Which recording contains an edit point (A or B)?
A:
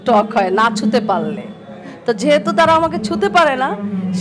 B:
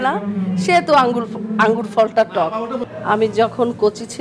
B